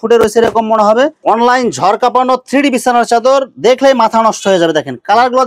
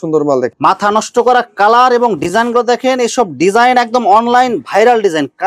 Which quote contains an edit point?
first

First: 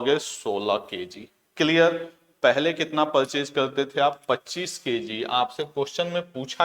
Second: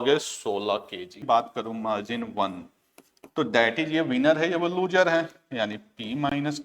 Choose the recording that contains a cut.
second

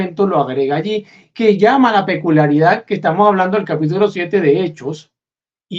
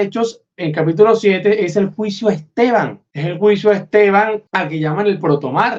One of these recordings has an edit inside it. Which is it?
second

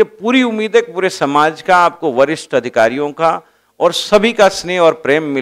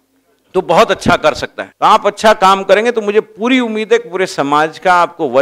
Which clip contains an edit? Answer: second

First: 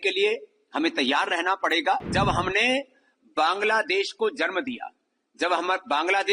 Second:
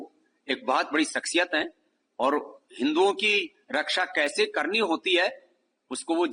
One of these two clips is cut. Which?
first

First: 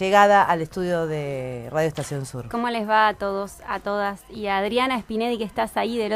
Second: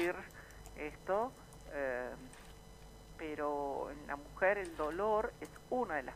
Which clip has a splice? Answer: second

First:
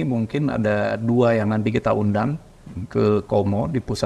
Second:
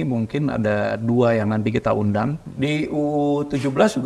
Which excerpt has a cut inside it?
second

